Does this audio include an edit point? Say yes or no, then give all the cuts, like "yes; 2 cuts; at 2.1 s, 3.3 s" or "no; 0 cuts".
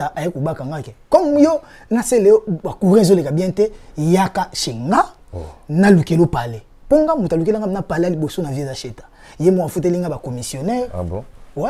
no; 0 cuts